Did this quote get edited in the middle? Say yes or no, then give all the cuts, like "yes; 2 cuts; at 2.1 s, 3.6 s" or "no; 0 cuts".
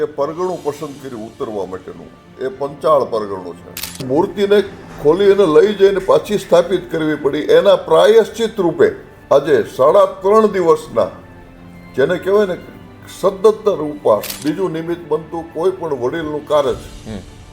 yes; 3 cuts; at 4.0 s, 9.1 s, 14.3 s